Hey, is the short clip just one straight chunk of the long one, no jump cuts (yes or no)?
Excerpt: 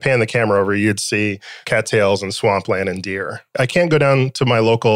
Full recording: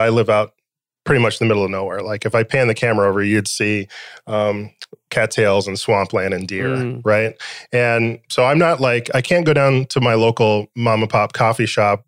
no